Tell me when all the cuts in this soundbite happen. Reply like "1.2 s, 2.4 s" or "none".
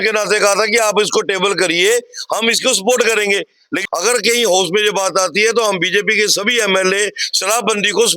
3.7 s